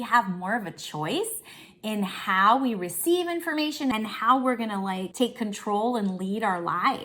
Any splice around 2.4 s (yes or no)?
no